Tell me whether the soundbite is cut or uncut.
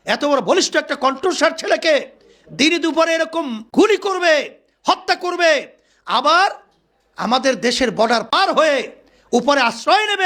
cut